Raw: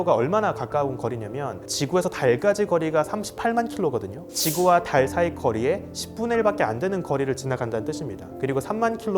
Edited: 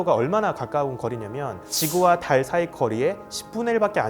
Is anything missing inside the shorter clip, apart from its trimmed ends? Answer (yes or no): yes